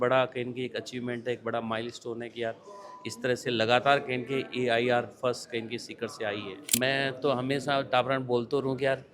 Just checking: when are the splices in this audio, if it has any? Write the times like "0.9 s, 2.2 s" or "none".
6.7 s